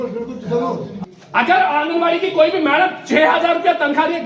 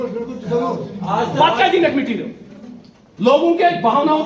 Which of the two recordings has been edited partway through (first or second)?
first